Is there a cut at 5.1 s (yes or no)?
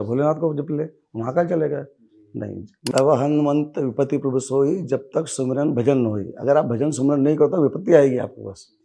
no